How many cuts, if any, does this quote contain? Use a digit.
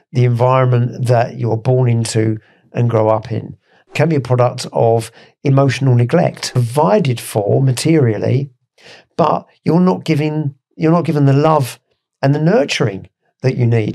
2